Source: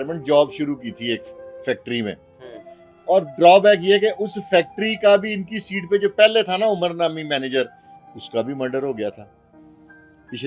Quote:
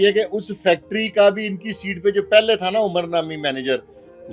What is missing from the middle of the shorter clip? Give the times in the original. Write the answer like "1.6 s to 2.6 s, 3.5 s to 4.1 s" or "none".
none

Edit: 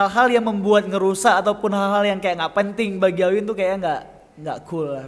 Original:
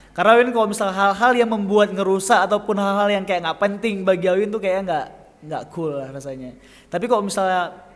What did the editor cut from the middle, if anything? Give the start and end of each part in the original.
none

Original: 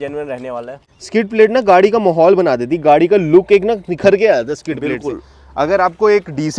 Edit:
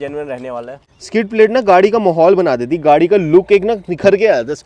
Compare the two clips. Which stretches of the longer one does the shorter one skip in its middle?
none

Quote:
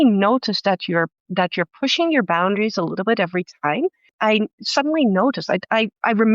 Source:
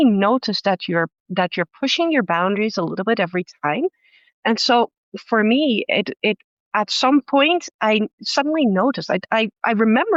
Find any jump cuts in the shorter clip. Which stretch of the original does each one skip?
4.1 s to 7.7 s

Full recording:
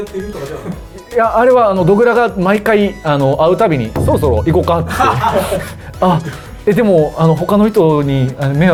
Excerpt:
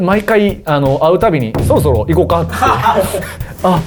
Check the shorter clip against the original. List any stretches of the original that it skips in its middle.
none

